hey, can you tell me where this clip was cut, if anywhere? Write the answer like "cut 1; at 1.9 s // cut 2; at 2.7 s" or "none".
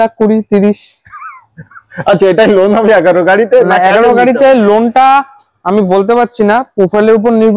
none